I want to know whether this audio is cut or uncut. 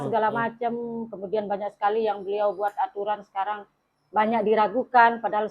uncut